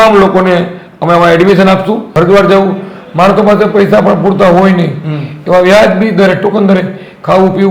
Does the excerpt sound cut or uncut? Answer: cut